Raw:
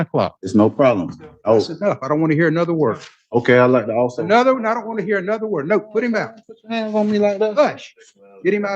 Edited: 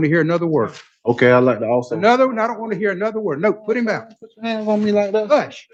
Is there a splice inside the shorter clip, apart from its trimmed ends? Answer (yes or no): no